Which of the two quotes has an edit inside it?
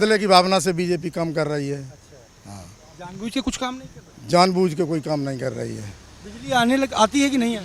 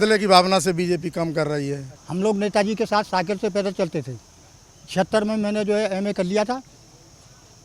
second; 1 cut; at 1.9 s

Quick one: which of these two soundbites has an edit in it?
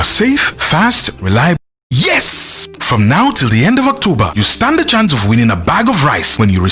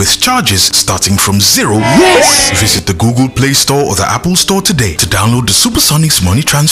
first; 1 cut; at 1.6 s

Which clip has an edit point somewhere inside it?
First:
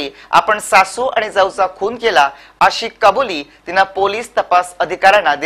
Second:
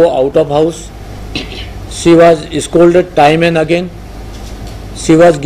first; 1 cut; at 3.1 s

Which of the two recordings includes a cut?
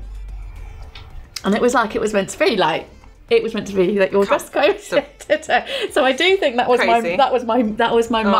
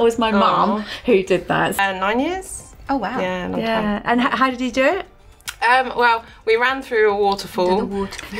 second; 1 cut; at 1.8 s

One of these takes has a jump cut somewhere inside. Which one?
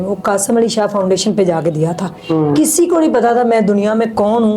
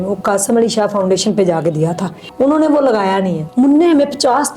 second; 2 cuts; at 2.2 s, 3.4 s

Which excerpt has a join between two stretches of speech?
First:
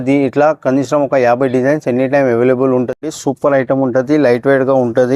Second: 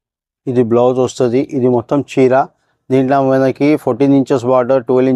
first; 1 cut; at 3.0 s

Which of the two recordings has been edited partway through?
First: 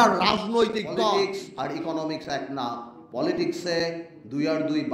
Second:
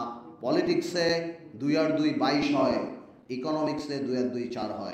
first; 1 cut; at 1.1 s

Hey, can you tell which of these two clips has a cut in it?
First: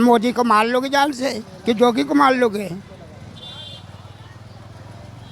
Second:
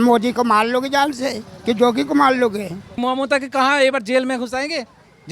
second; 1 cut; at 3.0 s

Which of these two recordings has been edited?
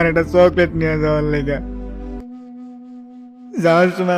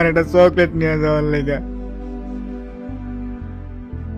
first; 1 cut; at 2.2 s

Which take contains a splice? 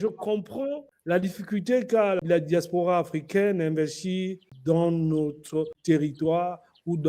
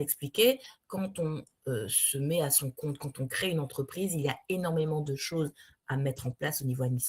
first; 4 cuts; at 0.9 s, 2.2 s, 4.4 s, 5.8 s

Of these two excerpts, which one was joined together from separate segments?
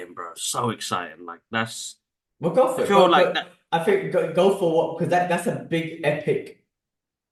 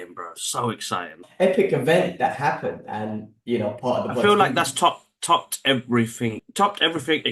second; 2 cuts; at 1.3 s, 6.4 s

